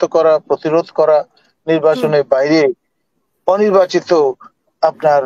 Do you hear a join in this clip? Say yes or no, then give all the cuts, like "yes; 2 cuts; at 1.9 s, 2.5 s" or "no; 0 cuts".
no; 0 cuts